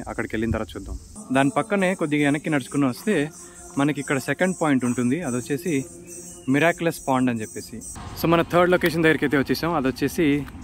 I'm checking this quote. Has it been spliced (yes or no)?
yes